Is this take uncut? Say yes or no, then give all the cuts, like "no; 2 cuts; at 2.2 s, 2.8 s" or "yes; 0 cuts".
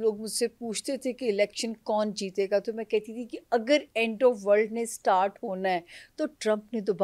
yes; 0 cuts